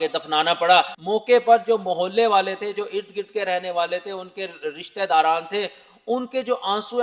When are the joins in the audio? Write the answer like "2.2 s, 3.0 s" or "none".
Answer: none